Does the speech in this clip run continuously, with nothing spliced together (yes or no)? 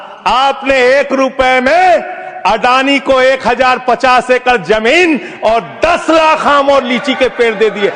yes